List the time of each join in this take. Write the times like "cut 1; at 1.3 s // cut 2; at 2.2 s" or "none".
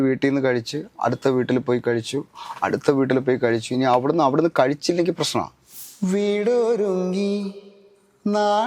cut 1; at 5.6 s